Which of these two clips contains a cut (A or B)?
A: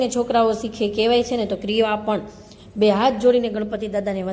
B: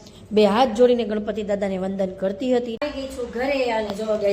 B